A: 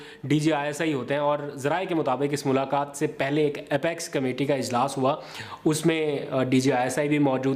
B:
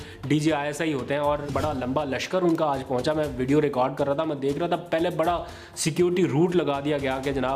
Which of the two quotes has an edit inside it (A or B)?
B